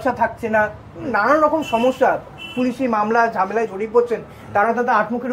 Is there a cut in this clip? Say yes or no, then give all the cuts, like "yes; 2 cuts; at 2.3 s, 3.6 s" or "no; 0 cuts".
no; 0 cuts